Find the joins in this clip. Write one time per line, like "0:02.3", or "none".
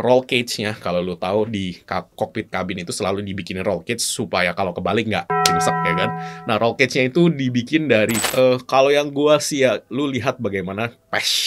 0:08.2